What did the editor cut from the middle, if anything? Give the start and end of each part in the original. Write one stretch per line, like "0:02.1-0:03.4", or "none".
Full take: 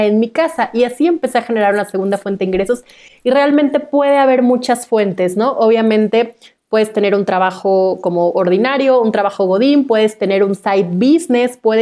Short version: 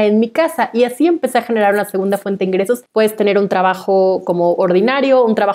0:02.8-0:06.6